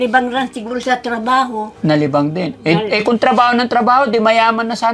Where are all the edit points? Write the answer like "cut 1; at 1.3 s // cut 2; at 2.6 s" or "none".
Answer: none